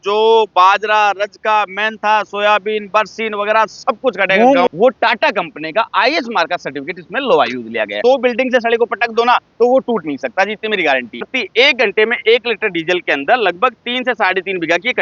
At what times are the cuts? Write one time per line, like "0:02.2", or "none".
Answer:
0:04.7
0:08.0
0:11.3